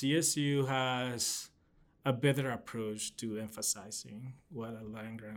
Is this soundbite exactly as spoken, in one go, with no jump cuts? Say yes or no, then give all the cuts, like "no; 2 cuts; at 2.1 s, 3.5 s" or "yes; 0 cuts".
yes; 0 cuts